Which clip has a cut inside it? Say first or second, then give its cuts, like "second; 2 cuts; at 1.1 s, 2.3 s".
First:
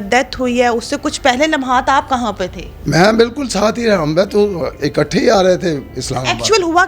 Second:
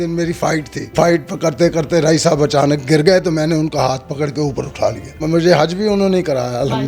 second; 2 cuts; at 0.9 s, 5.2 s